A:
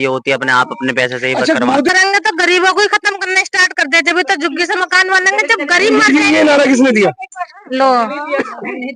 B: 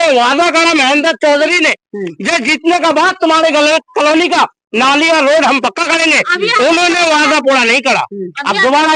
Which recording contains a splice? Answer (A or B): A